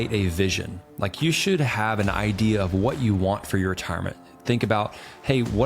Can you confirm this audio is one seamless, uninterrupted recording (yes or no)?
no